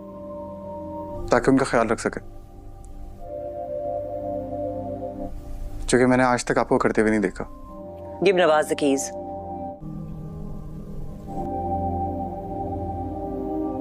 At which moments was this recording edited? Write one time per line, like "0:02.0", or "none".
0:01.1